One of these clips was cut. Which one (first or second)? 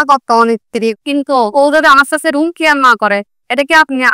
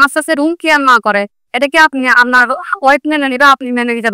first